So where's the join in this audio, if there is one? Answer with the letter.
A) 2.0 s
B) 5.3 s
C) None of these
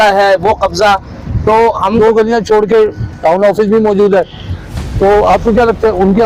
A